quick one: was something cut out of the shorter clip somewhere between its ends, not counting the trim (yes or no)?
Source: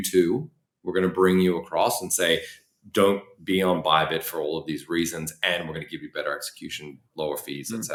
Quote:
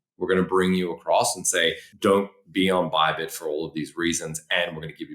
yes